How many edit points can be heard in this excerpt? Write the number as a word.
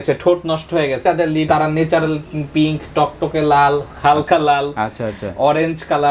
one